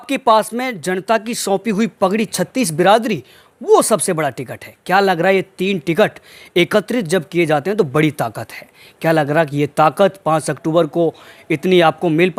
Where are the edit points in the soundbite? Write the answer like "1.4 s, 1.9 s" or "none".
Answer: none